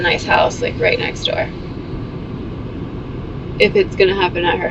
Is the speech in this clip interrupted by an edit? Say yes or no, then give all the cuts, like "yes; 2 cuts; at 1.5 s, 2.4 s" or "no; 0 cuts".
no; 0 cuts